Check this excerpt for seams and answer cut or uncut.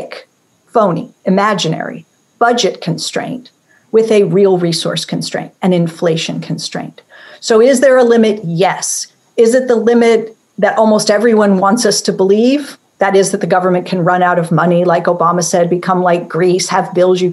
uncut